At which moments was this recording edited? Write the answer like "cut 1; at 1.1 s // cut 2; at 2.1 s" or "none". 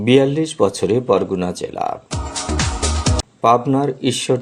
none